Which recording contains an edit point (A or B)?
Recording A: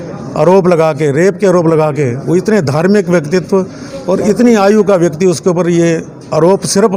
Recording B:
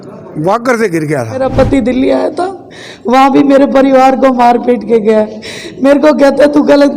B